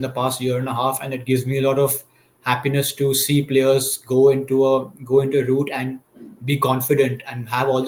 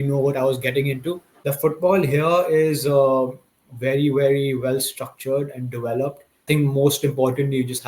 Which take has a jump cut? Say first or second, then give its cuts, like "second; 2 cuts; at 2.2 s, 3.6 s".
second; 2 cuts; at 1.3 s, 6.4 s